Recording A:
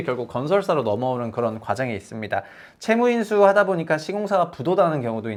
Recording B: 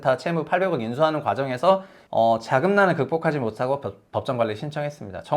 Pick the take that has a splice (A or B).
B